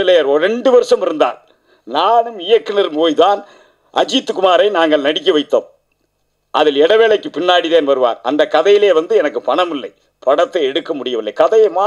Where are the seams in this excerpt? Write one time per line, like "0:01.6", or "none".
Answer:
none